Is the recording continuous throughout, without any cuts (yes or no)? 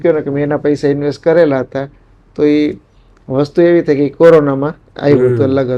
yes